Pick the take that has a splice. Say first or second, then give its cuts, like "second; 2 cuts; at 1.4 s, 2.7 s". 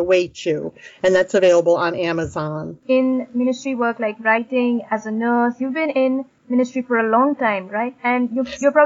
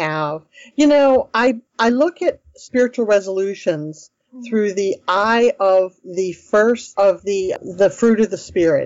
second; 1 cut; at 7.6 s